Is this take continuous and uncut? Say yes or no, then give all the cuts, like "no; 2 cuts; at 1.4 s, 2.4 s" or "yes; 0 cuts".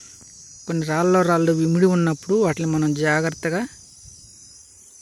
yes; 0 cuts